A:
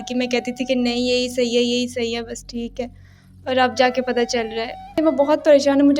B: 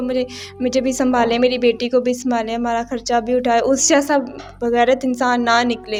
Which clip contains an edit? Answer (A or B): A